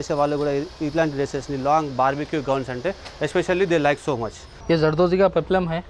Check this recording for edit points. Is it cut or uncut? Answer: cut